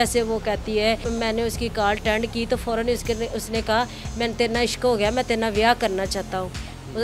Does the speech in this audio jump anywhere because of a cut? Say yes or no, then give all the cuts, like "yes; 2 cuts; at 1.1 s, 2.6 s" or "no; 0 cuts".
yes; 1 cut; at 1.0 s